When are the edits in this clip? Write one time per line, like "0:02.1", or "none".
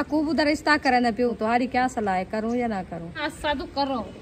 0:01.3
0:03.3